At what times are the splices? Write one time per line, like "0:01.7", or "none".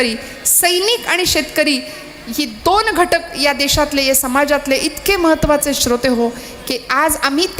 none